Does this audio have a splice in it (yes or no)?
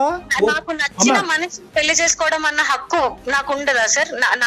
no